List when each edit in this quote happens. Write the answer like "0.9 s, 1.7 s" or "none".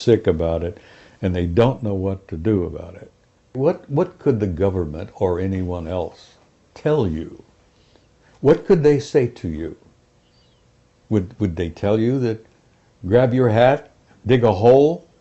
3.5 s